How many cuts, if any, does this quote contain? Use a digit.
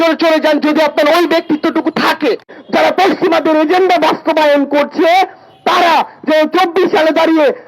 1